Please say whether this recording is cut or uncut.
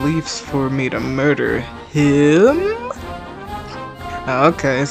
uncut